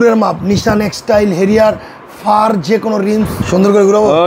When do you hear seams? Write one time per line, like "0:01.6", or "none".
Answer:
0:03.4

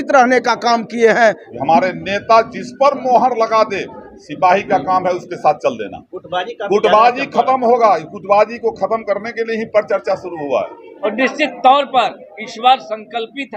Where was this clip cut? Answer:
0:01.5
0:11.0

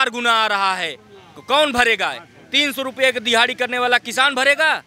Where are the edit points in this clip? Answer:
none

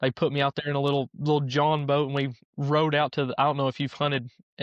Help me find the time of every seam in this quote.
none

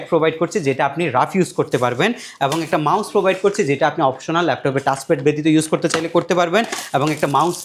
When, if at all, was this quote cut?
none

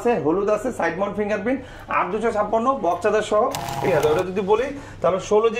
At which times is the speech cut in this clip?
0:03.9

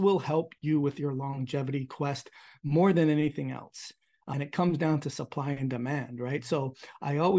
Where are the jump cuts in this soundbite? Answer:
0:04.3

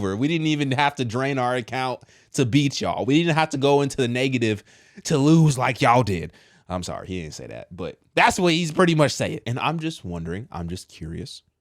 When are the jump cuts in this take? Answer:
0:09.4

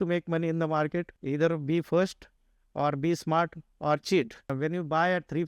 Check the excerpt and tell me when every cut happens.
0:01.2
0:04.5

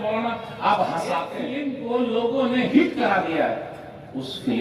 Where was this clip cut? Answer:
0:01.4

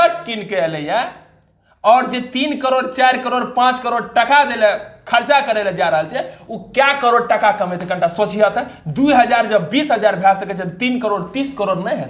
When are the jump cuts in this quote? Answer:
none

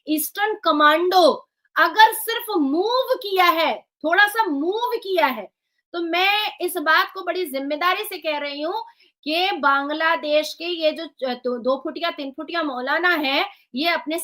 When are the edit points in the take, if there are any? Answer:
none

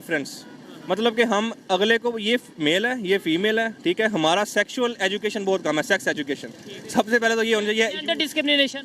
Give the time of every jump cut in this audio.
none

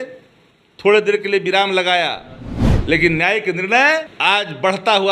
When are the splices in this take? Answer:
0:04.1

